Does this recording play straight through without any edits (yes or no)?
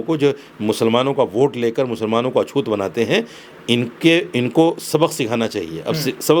yes